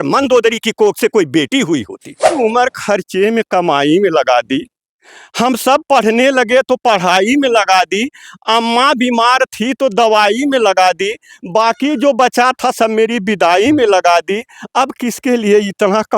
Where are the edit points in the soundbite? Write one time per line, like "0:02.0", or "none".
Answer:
0:02.4